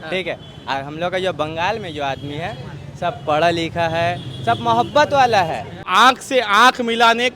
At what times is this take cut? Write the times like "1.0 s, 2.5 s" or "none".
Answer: 5.8 s